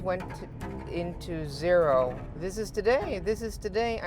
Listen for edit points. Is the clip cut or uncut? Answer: cut